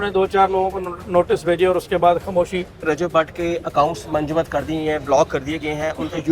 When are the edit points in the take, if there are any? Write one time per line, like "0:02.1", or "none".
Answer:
0:02.9